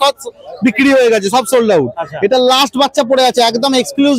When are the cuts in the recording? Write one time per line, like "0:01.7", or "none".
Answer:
none